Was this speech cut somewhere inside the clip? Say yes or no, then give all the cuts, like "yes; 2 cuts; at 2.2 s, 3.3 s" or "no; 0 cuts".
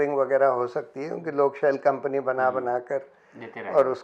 no; 0 cuts